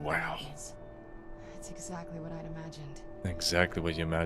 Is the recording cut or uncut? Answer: cut